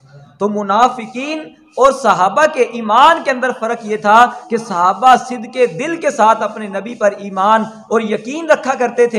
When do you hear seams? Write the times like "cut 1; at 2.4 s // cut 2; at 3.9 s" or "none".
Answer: none

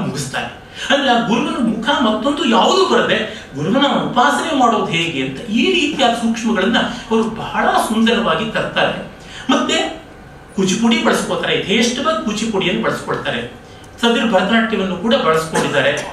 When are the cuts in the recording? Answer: none

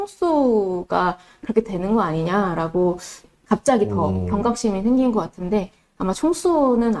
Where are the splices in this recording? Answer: none

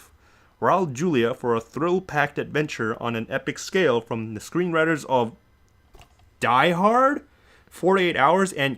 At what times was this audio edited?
cut 1; at 5.2 s

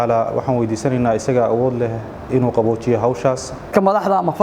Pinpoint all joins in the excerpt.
cut 1; at 3.5 s

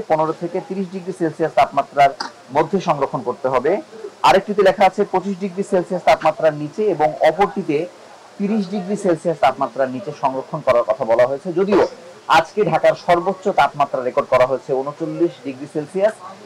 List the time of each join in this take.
none

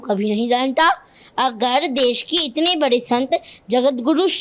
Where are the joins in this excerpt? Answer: none

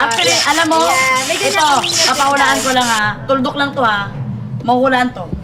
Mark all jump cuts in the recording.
none

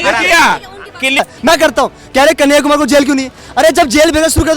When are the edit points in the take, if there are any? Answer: cut 1; at 1.2 s

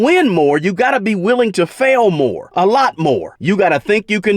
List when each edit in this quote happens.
cut 1; at 2.4 s // cut 2; at 3.3 s

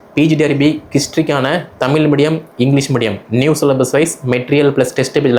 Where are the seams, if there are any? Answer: none

